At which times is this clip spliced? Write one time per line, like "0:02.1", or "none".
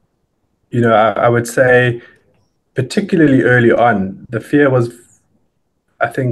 none

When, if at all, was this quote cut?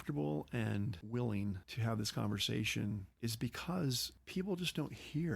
0:01.0
0:01.7
0:03.1
0:04.1

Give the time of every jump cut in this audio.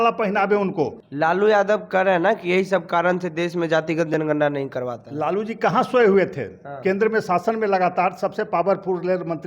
0:01.0

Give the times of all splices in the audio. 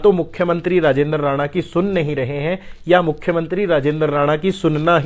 none

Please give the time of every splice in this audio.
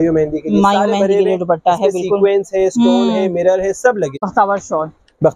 0:04.1

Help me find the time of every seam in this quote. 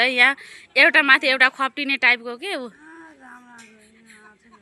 none

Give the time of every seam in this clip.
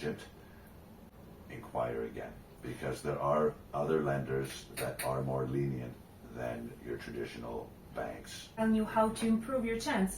0:01.1
0:08.6

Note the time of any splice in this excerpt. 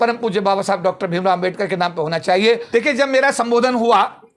0:02.6

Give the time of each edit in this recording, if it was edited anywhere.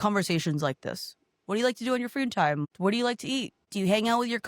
0:02.7
0:03.6

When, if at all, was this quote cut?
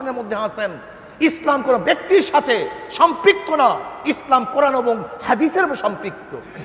none

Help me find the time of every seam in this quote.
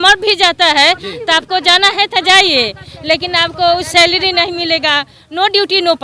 none

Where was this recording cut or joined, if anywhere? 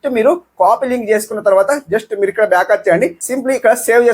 0:03.2

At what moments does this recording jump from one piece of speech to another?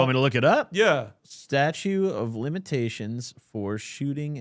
0:01.2

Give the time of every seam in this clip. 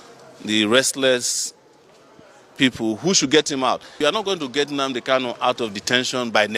0:04.2

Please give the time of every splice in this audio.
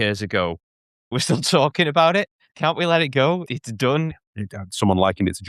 0:01.1
0:02.5
0:03.5
0:04.3

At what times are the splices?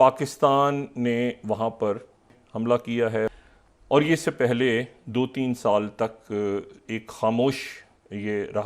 0:02.3
0:03.3

